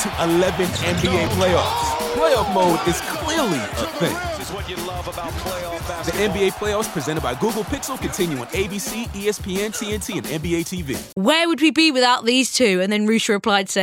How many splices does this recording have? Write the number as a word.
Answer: one